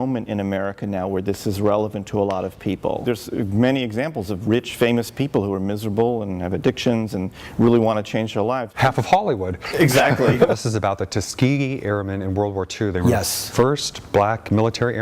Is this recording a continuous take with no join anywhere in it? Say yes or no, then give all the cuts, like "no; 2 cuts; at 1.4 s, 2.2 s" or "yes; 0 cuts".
no; 3 cuts; at 3.0 s, 8.8 s, 10.5 s